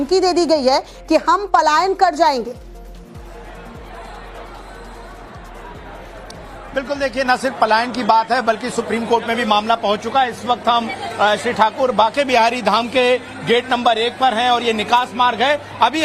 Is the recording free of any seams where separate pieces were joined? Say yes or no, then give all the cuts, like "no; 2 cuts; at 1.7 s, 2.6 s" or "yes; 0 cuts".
no; 1 cut; at 1.8 s